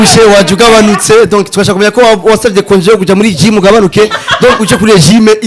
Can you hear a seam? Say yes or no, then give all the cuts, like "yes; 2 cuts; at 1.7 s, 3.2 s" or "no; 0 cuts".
no; 0 cuts